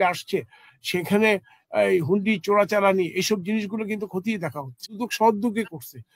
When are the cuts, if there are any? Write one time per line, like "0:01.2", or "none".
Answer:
0:05.0